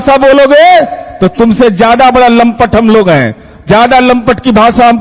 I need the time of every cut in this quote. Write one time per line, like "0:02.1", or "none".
none